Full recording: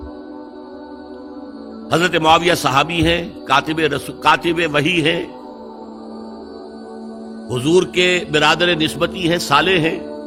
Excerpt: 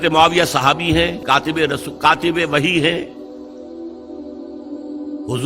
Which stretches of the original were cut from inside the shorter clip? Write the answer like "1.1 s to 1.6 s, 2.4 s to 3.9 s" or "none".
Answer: 3.3 s to 3.4 s